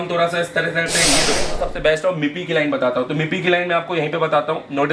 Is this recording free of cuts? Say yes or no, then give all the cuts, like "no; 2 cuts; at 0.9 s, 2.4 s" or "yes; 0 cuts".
no; 1 cut; at 1.5 s